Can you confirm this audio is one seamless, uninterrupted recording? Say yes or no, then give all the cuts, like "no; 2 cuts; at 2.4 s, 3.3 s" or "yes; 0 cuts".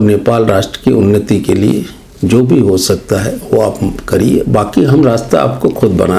yes; 0 cuts